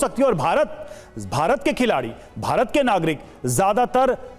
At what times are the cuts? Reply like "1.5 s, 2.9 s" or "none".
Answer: none

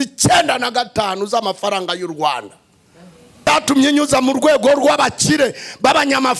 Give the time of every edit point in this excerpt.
3.5 s

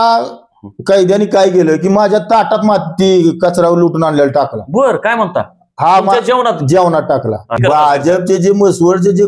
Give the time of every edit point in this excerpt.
7.6 s

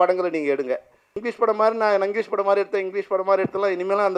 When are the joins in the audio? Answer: 1.2 s

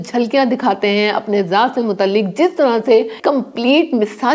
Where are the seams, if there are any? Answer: 3.2 s

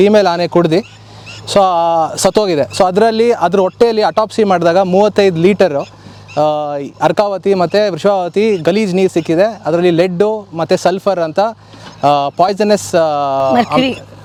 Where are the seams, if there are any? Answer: none

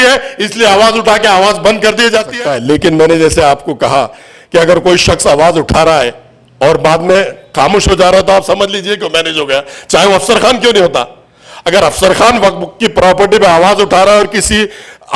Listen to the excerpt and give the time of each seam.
2.3 s

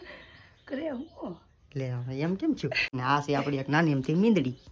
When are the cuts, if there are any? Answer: 2.8 s

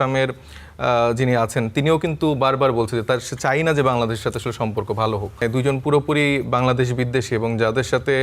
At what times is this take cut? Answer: 5.4 s

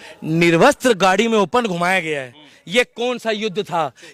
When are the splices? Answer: none

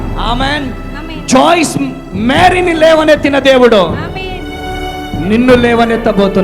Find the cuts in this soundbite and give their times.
none

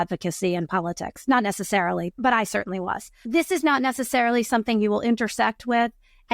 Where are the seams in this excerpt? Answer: 2.2 s, 3.2 s

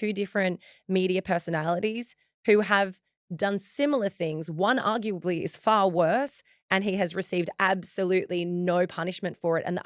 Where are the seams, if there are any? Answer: none

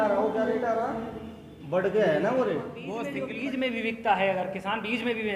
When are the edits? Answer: 3.0 s

